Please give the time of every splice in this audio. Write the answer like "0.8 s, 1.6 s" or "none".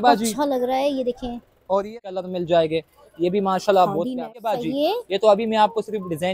2.0 s, 4.1 s